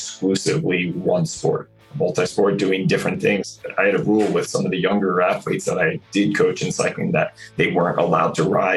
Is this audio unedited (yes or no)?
no